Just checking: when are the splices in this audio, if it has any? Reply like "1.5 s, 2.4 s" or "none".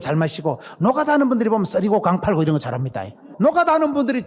3.3 s